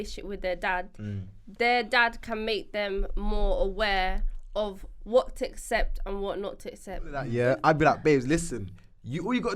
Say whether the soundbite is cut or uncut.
cut